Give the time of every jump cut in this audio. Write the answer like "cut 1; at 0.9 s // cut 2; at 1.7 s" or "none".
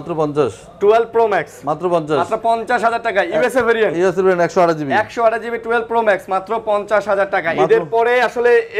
none